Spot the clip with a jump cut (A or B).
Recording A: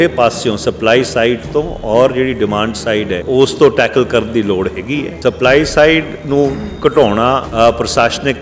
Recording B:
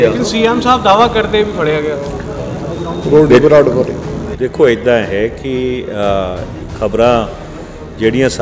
A